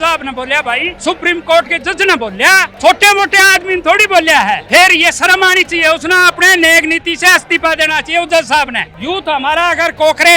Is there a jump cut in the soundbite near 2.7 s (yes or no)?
yes